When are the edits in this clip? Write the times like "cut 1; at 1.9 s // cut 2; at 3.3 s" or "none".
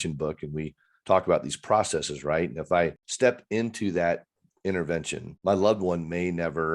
cut 1; at 3.0 s // cut 2; at 5.2 s